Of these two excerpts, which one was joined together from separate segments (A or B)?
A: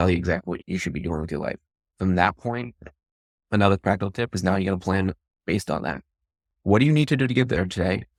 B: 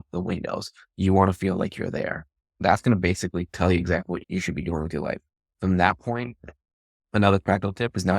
B